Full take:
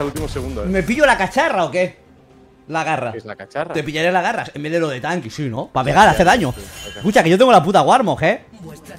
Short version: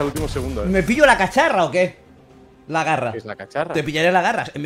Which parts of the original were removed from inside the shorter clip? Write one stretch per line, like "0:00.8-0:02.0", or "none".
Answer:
none